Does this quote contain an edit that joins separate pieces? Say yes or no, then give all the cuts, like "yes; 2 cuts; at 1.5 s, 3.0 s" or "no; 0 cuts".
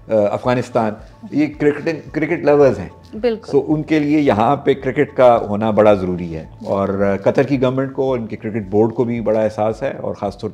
no; 0 cuts